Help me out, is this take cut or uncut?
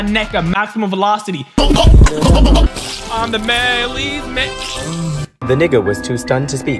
cut